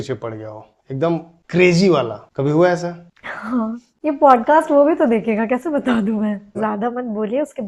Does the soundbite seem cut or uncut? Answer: cut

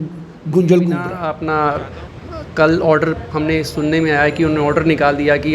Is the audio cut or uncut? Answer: cut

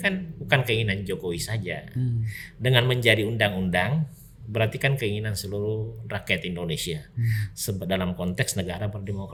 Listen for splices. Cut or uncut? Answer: uncut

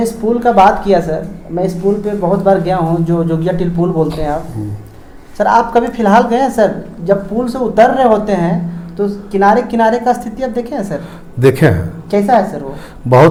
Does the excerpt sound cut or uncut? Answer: uncut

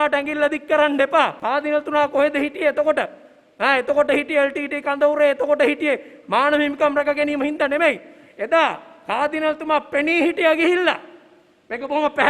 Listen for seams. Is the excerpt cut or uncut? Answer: cut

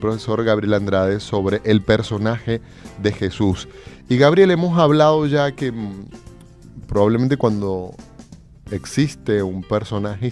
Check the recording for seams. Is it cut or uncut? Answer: cut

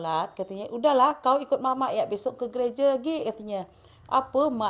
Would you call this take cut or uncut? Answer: uncut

